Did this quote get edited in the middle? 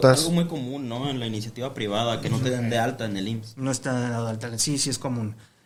no; 0 cuts

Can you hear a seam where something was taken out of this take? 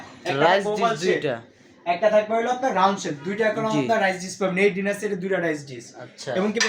no; 0 cuts

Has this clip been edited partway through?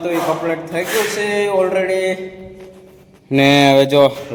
no; 0 cuts

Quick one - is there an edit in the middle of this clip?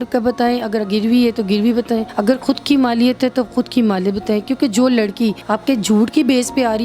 yes; 2 cuts; at 2.1 s, 5.4 s

